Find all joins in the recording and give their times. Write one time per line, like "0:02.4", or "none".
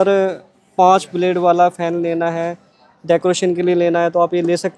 none